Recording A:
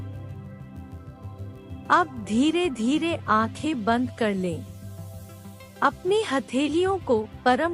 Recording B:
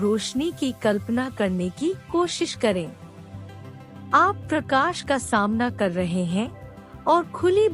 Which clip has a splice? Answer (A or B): A